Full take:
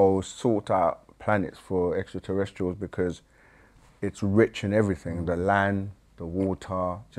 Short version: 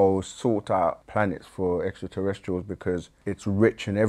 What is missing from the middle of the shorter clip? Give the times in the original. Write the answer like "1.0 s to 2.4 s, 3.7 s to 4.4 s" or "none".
1.0 s to 1.2 s, 3.2 s to 3.9 s

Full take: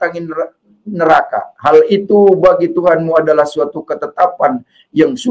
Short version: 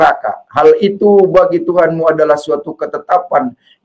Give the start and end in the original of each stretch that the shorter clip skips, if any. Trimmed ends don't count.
none

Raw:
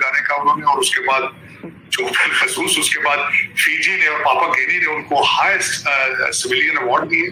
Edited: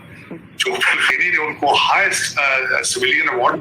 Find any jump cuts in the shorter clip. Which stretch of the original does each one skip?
2.5 s to 4.6 s

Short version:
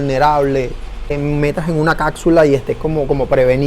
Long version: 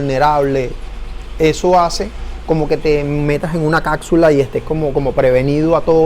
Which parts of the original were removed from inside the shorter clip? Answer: 1.2 s to 3.0 s

